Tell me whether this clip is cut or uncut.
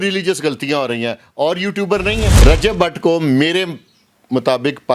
cut